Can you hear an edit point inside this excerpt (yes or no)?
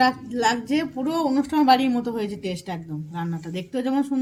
no